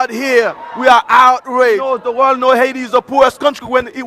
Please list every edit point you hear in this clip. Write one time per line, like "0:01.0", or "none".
0:01.8